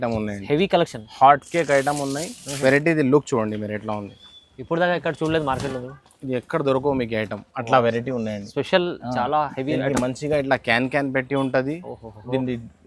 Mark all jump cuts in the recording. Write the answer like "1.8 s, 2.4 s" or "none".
none